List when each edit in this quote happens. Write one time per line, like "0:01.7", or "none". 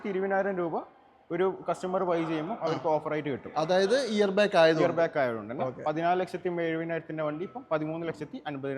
none